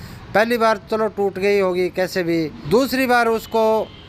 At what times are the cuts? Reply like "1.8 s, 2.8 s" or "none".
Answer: 2.6 s